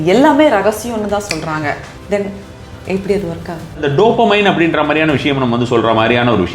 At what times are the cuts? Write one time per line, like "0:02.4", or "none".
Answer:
0:01.9
0:03.8

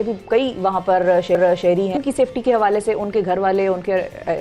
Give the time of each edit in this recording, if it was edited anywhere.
0:02.0

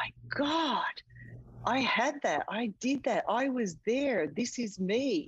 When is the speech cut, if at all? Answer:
none

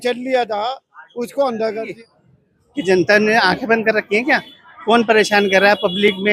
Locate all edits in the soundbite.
0:01.9

